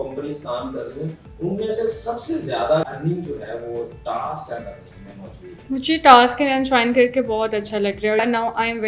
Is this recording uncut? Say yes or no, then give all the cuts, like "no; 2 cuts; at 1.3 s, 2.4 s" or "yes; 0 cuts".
no; 3 cuts; at 2.8 s, 5.5 s, 8.2 s